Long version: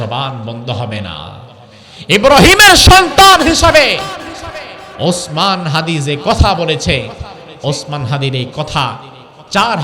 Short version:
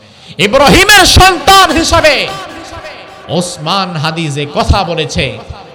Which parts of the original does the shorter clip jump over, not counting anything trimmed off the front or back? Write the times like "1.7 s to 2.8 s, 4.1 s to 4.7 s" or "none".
none